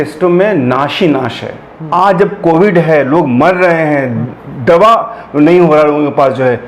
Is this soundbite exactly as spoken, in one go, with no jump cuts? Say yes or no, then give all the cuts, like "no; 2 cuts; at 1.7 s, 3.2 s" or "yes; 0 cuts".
no; 1 cut; at 1.7 s